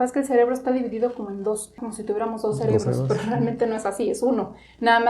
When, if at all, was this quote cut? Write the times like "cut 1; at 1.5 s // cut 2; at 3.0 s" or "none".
cut 1; at 1.8 s